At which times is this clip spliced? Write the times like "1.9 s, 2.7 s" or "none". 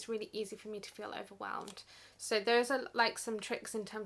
none